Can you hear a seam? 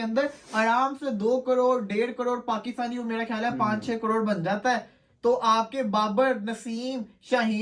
no; 0 cuts

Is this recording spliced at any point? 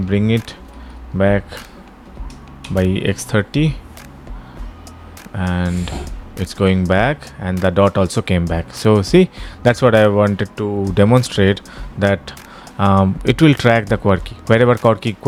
no; 0 cuts

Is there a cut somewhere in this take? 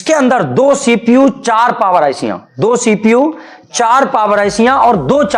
no; 0 cuts

